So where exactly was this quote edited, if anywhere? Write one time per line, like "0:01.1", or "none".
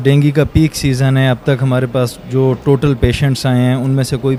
none